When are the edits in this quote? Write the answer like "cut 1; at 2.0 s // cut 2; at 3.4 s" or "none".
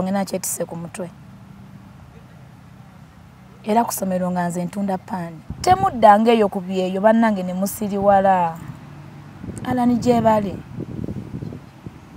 cut 1; at 5.4 s